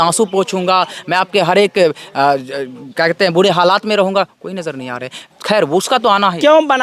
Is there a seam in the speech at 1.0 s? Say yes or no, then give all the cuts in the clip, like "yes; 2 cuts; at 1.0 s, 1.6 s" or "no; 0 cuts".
no; 0 cuts